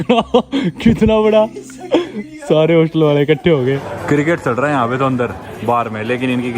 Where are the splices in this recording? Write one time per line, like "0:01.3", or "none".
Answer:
0:03.9